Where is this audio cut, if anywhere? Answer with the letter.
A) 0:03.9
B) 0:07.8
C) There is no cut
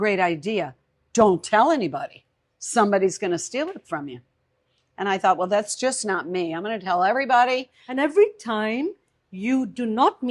B